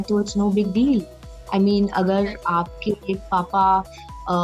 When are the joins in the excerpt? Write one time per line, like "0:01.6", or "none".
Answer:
none